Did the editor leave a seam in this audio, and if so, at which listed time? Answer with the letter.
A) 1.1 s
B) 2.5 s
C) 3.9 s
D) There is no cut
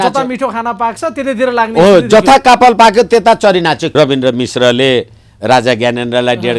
C